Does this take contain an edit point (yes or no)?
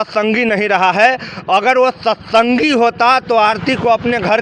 no